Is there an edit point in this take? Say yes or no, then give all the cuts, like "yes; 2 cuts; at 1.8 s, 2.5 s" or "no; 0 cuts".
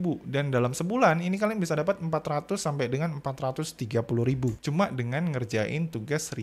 yes; 1 cut; at 4.6 s